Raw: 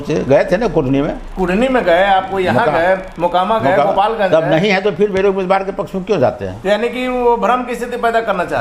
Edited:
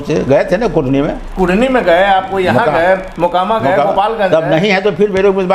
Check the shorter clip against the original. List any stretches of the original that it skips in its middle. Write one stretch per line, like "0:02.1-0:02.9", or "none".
none